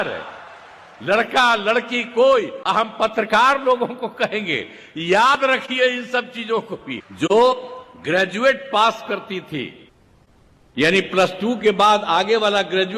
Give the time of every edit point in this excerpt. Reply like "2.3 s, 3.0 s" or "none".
7.0 s